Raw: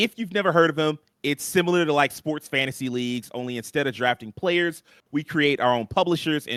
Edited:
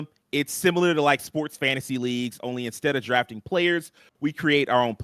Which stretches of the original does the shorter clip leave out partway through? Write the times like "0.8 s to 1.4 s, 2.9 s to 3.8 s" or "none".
none